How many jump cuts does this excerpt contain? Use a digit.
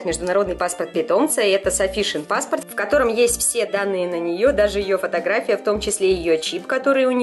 0